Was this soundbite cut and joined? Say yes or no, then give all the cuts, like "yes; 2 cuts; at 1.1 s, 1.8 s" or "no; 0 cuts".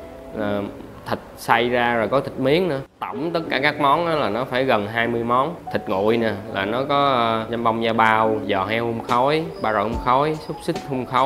yes; 5 cuts; at 2.9 s, 5.6 s, 7.5 s, 8.4 s, 9.5 s